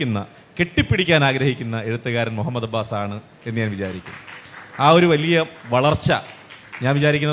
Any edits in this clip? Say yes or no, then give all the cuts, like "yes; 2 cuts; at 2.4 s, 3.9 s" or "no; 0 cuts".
no; 0 cuts